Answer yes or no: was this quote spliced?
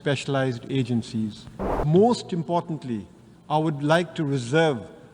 yes